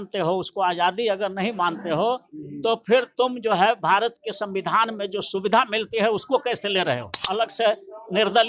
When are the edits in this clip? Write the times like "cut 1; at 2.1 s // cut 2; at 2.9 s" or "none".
cut 1; at 7.2 s